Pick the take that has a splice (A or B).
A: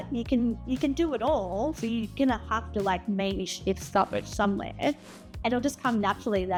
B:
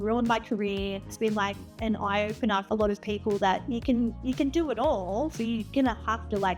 B